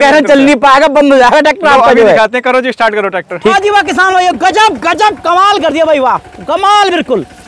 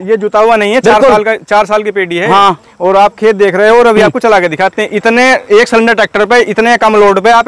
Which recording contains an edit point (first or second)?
first